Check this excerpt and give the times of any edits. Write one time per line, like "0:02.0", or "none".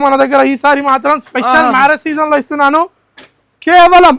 none